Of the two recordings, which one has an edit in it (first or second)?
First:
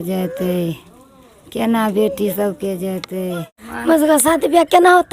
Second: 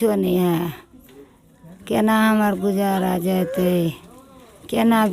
first